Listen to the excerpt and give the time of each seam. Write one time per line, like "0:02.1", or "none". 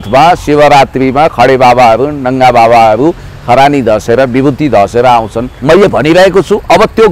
0:05.5